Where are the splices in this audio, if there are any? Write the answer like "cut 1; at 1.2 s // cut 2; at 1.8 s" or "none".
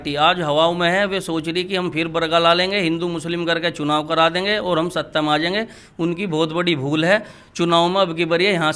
none

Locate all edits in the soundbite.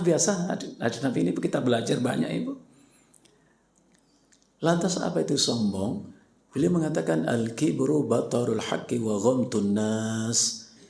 cut 1; at 3.7 s

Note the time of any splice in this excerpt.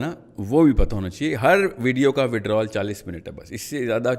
none

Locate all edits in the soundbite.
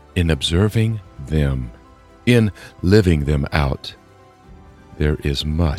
none

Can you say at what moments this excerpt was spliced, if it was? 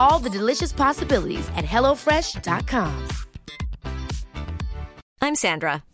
cut 1; at 5.0 s

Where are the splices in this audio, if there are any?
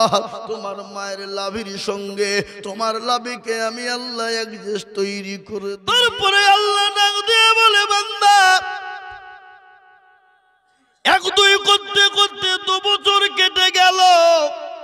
cut 1; at 5.4 s

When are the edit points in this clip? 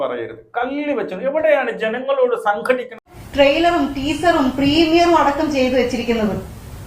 cut 1; at 3.2 s

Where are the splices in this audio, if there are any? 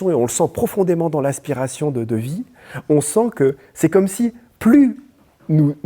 none

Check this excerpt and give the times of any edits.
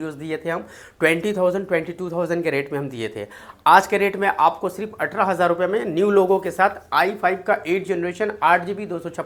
none

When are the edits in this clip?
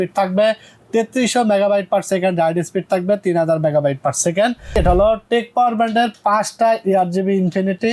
cut 1; at 4.7 s

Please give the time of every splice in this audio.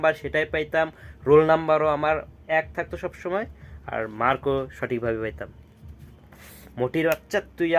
none

